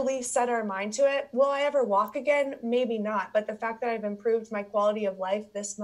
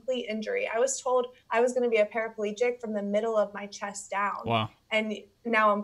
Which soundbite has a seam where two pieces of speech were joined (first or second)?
second